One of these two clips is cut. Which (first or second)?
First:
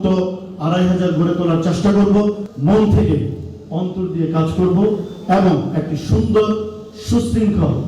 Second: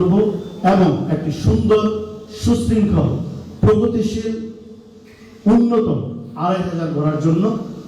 first